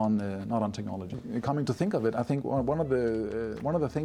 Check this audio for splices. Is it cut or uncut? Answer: cut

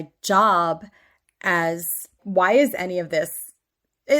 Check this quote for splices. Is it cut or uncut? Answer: cut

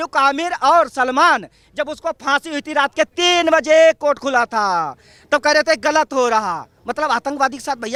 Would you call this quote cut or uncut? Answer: uncut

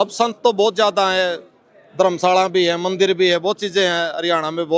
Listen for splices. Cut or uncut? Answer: uncut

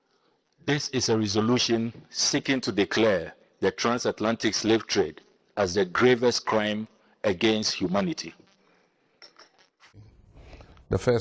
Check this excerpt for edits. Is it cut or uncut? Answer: cut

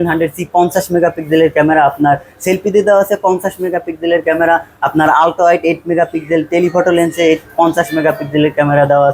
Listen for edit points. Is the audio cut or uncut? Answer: uncut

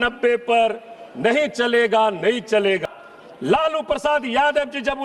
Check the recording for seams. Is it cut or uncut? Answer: cut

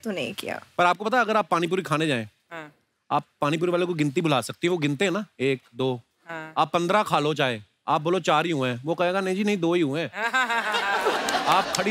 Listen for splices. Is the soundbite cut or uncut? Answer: uncut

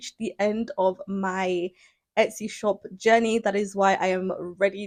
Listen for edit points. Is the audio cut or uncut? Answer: uncut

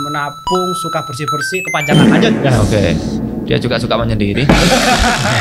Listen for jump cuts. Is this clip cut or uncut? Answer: uncut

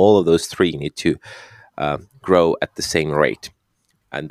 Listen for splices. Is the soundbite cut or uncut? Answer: uncut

